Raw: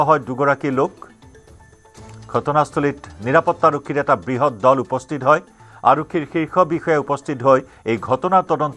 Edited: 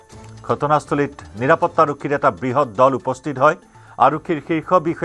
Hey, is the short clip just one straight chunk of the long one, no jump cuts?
yes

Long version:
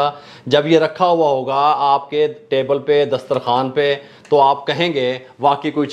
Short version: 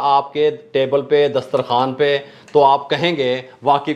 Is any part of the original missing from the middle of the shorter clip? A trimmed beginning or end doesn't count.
no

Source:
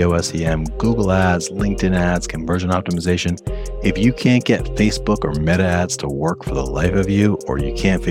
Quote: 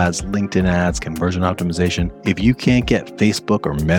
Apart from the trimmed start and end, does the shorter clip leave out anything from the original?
yes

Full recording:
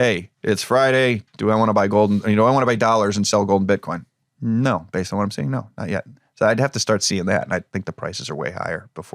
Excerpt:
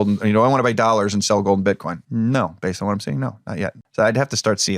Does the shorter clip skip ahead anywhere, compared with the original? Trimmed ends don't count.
yes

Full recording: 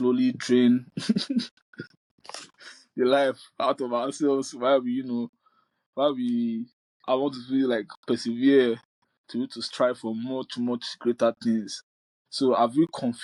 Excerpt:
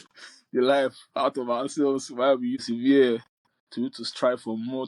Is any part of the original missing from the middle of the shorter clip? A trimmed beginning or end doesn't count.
yes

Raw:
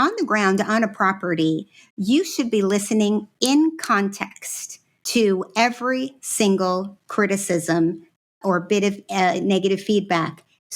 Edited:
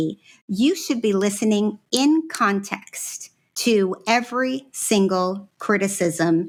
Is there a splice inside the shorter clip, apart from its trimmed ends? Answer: no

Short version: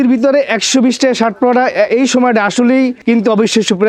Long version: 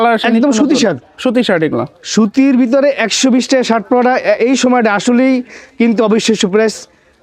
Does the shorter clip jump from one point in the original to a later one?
yes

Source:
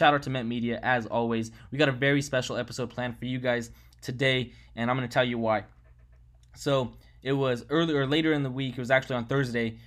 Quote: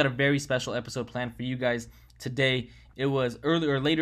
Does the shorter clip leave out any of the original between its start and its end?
yes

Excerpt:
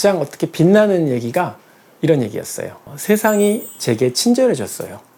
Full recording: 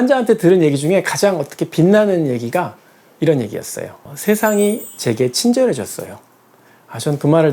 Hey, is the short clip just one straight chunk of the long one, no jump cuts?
yes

